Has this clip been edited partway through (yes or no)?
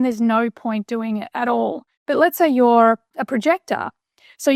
yes